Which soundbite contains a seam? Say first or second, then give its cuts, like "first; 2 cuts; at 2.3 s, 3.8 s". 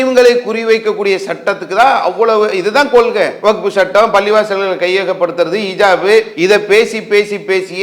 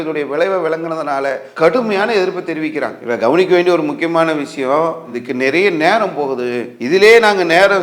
first; 2 cuts; at 3.3 s, 6.3 s